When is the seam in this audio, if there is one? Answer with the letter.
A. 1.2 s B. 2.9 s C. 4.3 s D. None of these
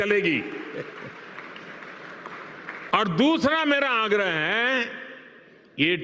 B